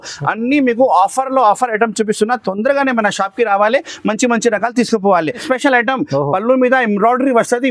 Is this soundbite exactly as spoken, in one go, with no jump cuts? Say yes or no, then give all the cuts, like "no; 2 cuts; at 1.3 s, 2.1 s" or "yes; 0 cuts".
no; 1 cut; at 5.4 s